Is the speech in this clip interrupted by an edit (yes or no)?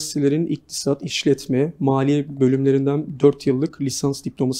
no